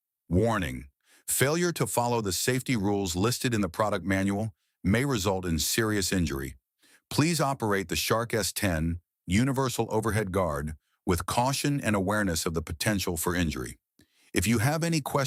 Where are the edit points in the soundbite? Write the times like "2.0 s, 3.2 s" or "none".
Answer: none